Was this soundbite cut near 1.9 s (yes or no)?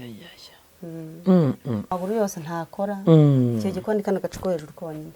yes